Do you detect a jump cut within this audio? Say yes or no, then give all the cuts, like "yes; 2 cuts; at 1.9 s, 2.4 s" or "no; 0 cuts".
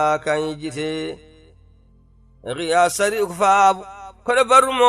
yes; 1 cut; at 1.9 s